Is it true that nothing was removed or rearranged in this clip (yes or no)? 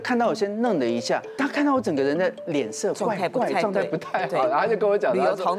no